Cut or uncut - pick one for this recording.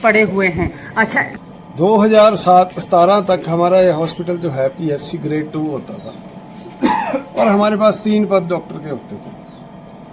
cut